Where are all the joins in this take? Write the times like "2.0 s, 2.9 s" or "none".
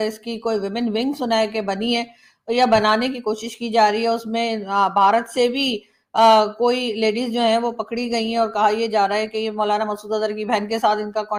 none

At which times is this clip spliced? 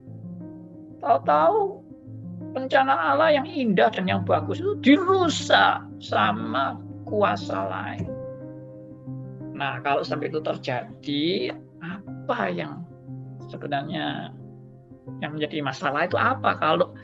none

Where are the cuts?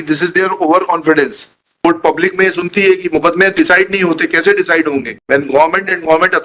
1.6 s

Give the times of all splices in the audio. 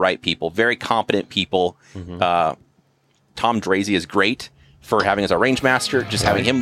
3.2 s

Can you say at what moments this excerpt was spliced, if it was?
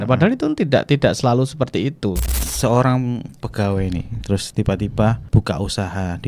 2.5 s, 5.2 s

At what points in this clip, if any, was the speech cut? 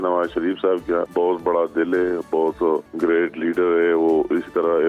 1.1 s, 2.9 s

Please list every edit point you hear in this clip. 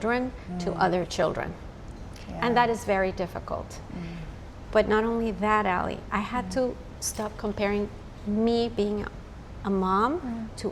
none

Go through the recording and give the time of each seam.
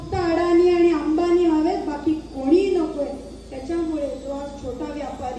none

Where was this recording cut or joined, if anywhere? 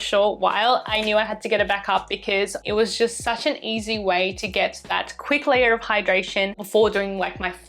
2.6 s

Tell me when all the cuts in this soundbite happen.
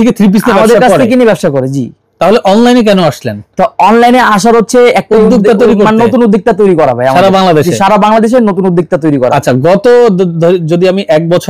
none

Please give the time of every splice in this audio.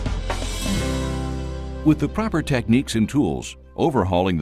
1.7 s

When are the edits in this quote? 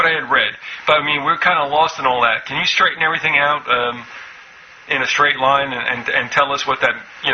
none

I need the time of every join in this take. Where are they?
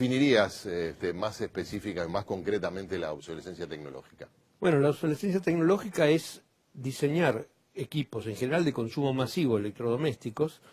none

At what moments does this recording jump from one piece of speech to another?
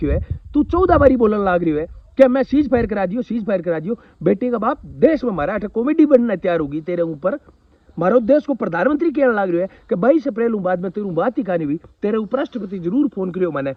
none

